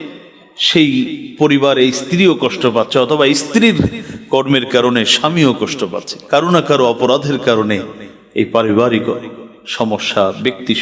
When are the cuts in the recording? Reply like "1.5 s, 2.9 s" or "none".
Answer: 6.1 s